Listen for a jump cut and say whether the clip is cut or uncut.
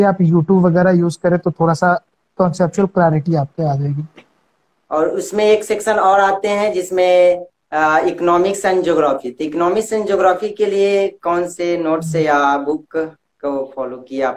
uncut